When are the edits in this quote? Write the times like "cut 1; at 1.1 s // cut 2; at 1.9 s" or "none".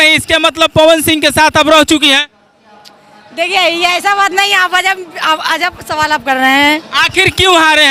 none